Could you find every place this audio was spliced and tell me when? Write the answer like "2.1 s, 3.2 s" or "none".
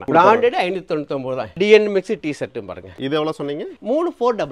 1.6 s

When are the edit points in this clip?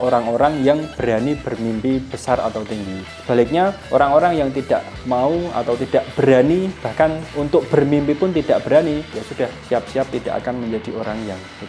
none

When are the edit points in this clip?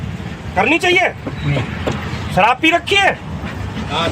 1.7 s

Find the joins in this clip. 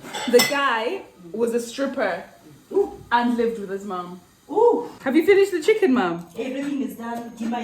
4.9 s

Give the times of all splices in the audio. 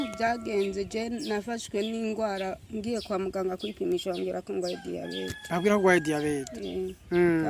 none

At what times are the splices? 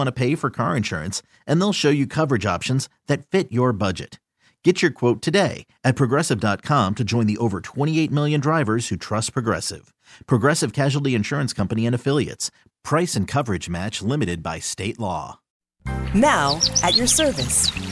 15.7 s

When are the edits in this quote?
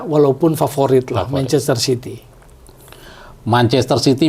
none

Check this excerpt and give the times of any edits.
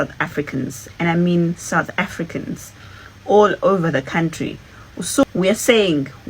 5.2 s

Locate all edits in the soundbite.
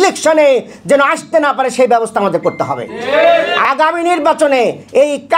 3.5 s

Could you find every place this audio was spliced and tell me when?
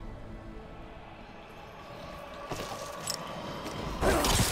1.4 s

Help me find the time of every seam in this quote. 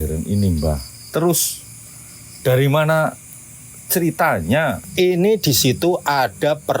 4.8 s

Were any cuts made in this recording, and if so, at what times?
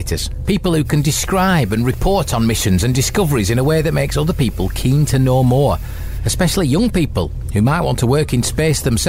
none

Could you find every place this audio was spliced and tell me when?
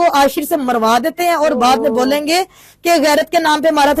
none

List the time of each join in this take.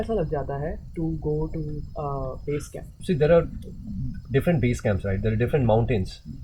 2.9 s

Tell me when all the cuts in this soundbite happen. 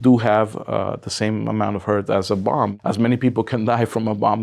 2.8 s

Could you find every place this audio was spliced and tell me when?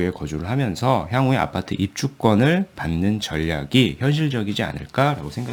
none

